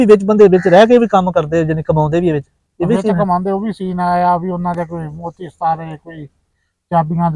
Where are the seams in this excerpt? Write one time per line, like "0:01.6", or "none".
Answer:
none